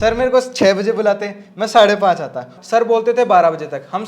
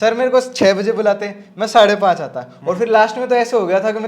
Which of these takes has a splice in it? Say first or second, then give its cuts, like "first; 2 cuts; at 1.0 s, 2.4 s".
first; 1 cut; at 2.5 s